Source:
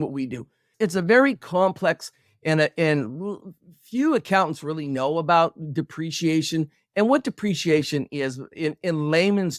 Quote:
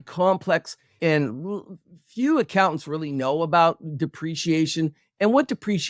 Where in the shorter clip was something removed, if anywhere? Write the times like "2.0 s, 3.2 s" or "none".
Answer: 1.0 s